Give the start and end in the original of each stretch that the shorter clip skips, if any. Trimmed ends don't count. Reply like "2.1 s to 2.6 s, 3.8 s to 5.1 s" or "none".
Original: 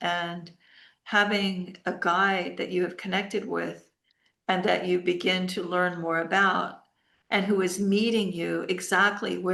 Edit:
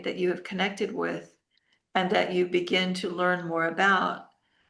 none